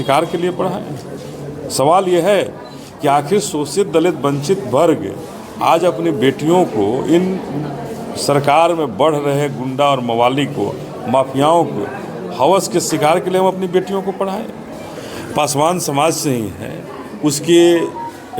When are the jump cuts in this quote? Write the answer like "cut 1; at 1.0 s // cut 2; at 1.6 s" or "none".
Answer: cut 1; at 15.0 s